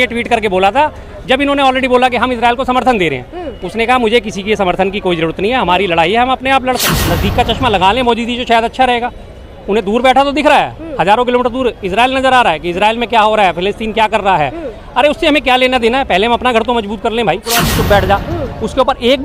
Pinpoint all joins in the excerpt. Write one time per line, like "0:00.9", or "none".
0:06.9
0:17.7